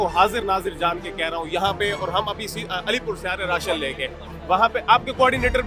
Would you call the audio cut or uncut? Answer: uncut